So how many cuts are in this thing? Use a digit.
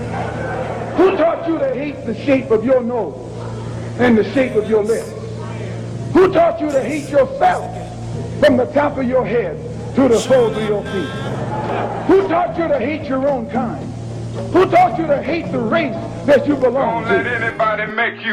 1